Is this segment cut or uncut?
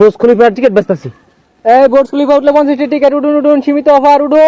uncut